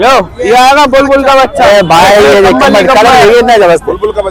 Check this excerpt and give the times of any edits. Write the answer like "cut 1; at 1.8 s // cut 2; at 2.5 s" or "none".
none